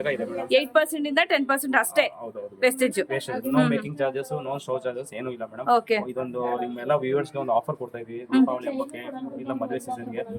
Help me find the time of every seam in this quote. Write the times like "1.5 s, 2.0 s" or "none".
none